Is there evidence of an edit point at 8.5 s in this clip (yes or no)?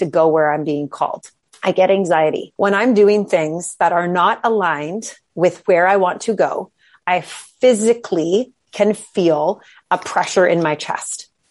no